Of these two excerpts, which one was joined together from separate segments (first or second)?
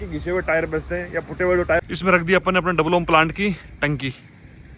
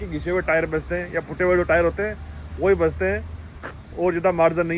first